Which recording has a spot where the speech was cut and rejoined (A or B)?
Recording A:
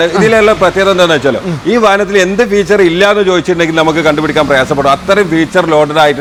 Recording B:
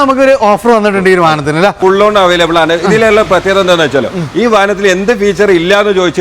B